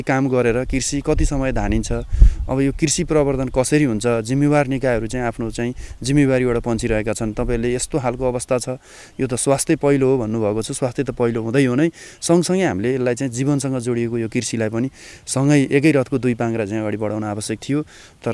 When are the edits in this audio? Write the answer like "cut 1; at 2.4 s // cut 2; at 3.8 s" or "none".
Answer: none